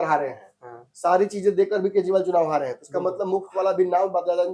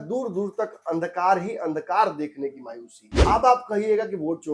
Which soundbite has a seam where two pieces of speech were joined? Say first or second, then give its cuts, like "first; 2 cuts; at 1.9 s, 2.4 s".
second; 1 cut; at 3.2 s